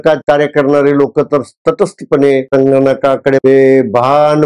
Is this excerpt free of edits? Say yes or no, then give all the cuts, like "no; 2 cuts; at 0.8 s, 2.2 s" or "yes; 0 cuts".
yes; 0 cuts